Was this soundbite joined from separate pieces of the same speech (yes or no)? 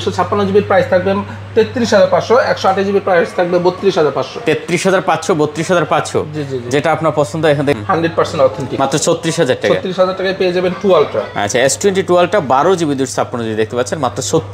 yes